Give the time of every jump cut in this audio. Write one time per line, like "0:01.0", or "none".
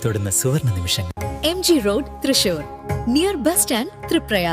none